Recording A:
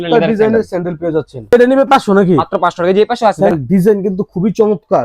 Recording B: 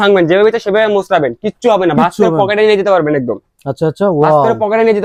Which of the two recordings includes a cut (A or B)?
A